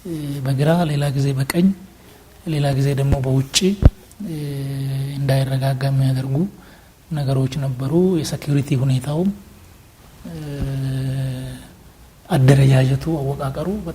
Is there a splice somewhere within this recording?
no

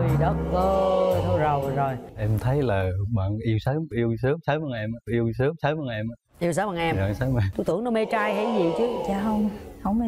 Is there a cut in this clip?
yes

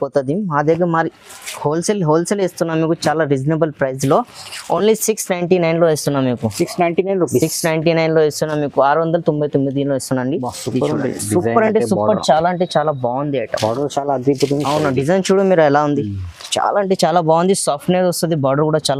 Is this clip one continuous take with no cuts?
yes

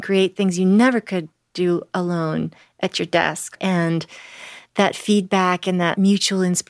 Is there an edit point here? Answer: yes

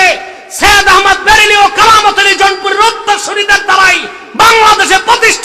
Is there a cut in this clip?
no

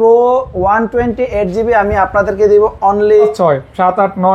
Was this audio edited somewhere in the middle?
yes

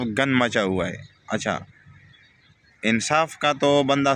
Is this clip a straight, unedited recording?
yes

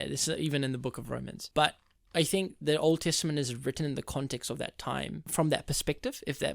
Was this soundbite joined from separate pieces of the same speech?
yes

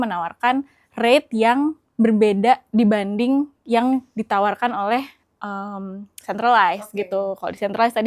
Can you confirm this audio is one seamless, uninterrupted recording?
yes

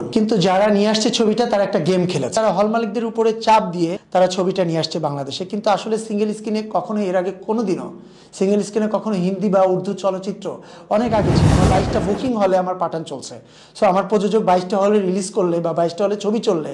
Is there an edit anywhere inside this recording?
yes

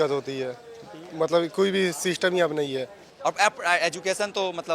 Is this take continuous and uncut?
no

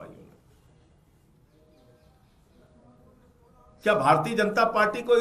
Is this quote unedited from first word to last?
no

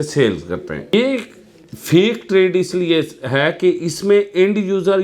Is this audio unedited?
no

